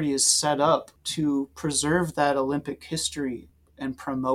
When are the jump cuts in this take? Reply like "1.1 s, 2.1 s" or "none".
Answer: 1.0 s, 3.5 s